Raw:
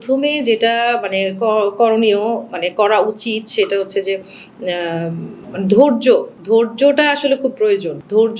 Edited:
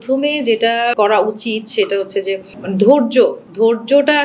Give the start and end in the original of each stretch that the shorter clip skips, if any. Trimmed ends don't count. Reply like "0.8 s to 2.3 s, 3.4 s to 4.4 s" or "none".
0.9 s to 2.7 s, 4.3 s to 5.4 s